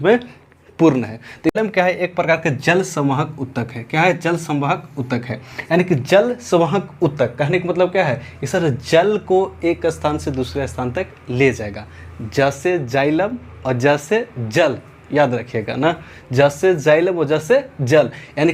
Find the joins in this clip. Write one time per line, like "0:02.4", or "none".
0:01.6